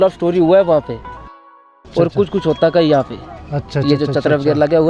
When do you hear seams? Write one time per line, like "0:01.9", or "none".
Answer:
0:01.4